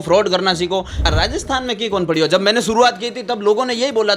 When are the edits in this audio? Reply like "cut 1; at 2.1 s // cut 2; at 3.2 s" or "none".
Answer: cut 1; at 1.1 s

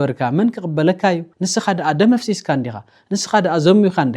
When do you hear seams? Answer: cut 1; at 1.3 s

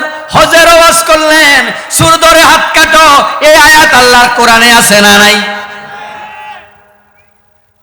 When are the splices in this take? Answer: none

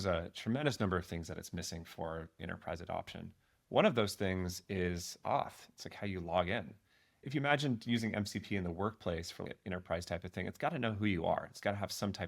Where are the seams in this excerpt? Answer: cut 1; at 7.2 s

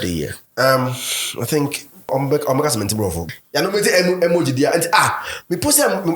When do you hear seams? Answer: cut 1; at 2.1 s // cut 2; at 3.2 s

